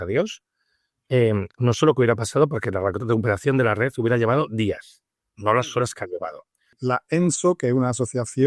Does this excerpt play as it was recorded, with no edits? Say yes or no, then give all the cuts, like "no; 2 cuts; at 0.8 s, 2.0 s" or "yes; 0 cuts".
no; 1 cut; at 6.7 s